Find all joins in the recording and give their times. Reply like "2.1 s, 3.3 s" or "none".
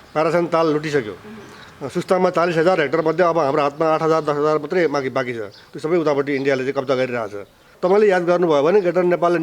7.7 s